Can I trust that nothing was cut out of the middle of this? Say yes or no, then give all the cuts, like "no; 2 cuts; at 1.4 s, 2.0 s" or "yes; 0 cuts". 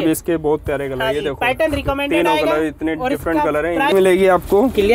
no; 1 cut; at 3.9 s